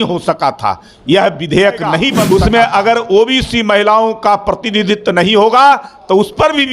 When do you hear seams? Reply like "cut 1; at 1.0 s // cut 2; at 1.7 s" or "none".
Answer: cut 1; at 2.2 s